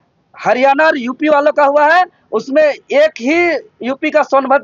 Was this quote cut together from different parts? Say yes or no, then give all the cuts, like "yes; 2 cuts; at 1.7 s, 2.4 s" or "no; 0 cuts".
no; 0 cuts